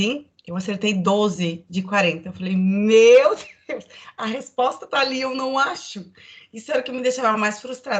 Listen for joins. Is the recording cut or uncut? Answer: uncut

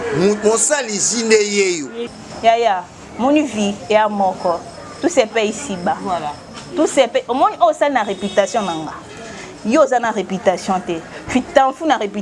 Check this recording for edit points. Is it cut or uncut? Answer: cut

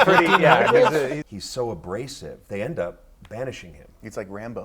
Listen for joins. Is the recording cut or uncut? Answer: cut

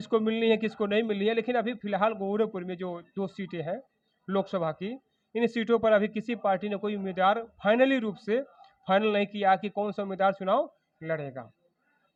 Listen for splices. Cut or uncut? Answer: uncut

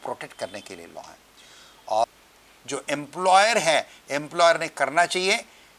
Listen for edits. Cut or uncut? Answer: cut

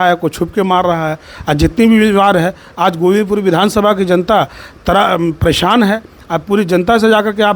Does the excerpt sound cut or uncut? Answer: uncut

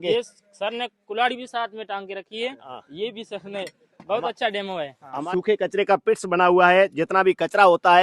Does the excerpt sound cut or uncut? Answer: cut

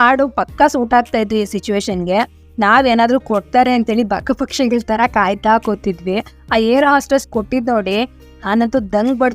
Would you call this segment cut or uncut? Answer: cut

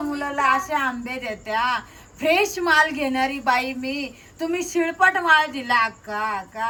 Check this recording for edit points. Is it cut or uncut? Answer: uncut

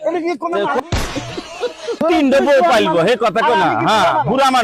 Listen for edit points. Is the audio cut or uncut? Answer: cut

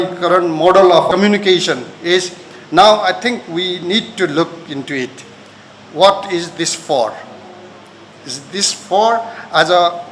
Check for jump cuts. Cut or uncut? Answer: cut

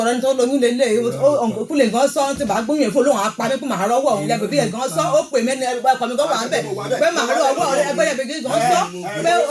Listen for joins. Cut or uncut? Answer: uncut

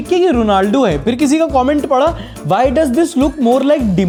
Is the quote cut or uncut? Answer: uncut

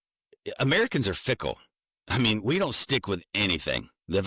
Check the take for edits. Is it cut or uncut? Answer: uncut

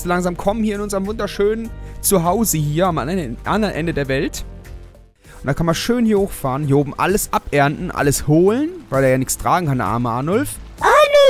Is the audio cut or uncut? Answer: cut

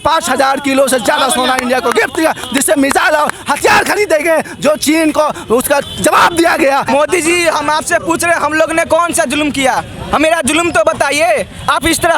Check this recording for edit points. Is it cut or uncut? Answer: cut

